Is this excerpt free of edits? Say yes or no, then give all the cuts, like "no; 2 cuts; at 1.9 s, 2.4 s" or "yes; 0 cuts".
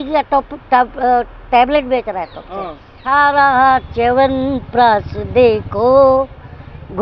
no; 1 cut; at 3.0 s